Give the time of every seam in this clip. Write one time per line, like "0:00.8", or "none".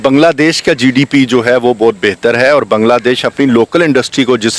none